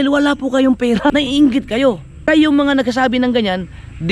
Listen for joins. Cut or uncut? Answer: cut